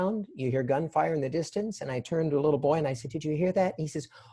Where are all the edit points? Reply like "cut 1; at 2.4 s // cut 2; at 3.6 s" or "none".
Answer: none